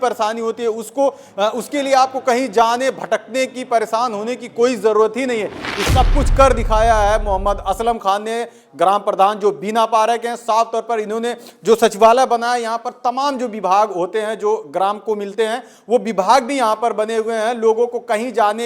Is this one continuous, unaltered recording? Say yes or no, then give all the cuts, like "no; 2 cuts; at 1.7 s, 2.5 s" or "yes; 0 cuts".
no; 1 cut; at 5.9 s